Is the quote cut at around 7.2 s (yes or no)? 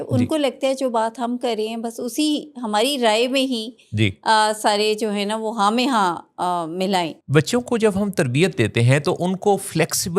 yes